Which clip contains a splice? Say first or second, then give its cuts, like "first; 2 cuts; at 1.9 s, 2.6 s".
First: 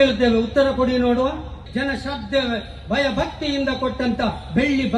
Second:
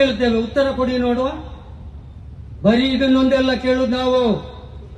first; 1 cut; at 1.6 s